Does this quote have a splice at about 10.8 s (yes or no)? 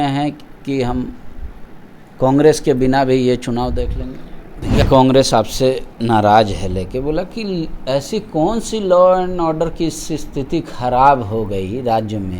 no